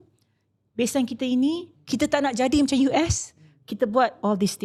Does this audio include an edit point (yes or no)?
no